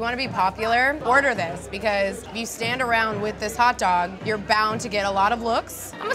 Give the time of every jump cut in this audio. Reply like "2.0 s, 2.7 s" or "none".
1.0 s, 2.3 s, 4.2 s